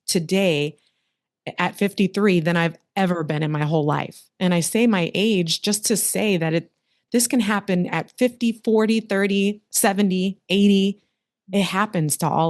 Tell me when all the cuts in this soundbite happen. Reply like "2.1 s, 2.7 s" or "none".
none